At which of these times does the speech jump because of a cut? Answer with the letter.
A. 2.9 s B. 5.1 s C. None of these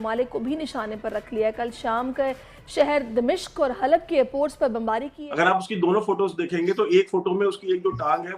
B